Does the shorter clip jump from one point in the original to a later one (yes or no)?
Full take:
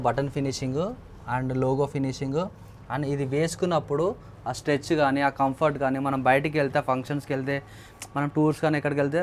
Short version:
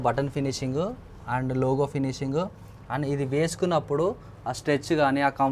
no